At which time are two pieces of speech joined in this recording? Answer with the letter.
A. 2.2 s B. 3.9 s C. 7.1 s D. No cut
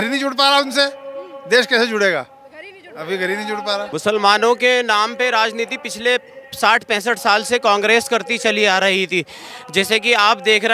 B